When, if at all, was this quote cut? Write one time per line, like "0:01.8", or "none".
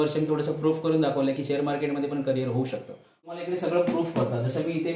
0:03.4